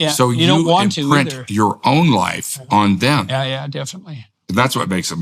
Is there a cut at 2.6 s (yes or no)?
no